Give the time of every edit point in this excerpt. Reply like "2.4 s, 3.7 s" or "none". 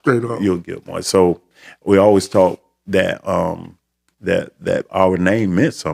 none